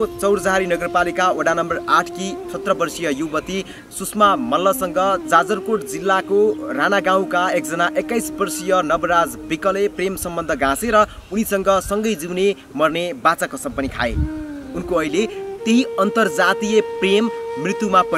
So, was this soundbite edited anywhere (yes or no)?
no